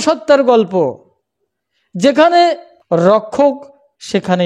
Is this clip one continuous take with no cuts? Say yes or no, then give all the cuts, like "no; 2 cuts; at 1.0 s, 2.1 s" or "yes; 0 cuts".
no; 1 cut; at 2.7 s